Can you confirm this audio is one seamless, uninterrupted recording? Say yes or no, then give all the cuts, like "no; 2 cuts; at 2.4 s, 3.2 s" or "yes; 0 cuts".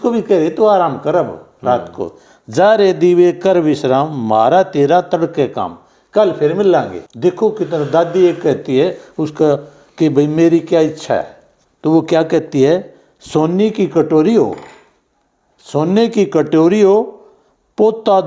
no; 1 cut; at 7.0 s